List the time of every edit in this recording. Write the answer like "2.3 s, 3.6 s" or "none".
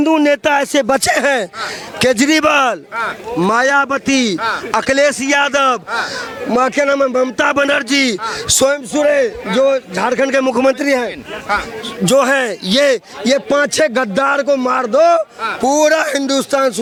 none